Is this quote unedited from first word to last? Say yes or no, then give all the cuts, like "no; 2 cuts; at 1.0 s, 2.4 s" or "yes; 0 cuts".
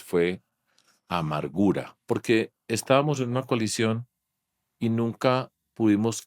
no; 1 cut; at 1.9 s